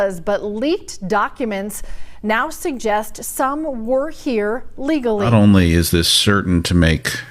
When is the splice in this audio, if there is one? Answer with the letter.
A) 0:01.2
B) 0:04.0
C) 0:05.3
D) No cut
C